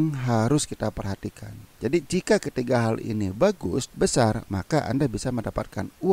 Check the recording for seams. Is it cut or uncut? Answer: cut